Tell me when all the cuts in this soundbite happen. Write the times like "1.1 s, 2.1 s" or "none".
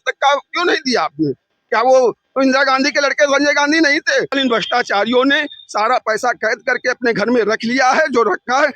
4.3 s